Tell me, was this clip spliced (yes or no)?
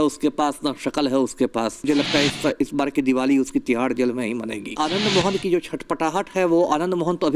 yes